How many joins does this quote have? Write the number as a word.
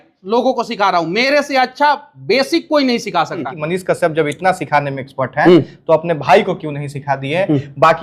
one